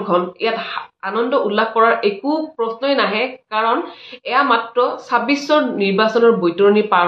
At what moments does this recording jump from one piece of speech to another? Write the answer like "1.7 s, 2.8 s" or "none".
none